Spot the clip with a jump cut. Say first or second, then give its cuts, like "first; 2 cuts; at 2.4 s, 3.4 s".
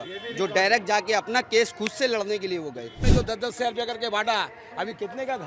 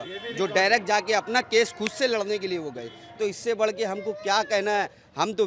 first; 1 cut; at 3.0 s